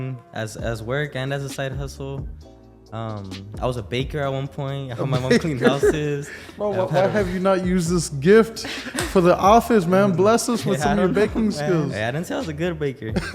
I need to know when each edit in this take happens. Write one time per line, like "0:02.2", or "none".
0:11.9